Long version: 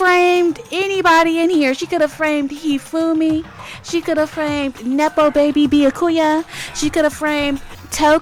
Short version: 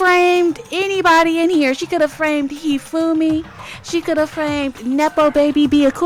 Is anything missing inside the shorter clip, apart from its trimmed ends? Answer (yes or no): no